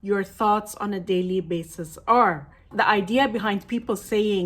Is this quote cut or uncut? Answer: cut